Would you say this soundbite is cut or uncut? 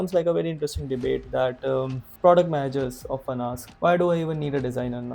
cut